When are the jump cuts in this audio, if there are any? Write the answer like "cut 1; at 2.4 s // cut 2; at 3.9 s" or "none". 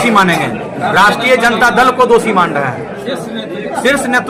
none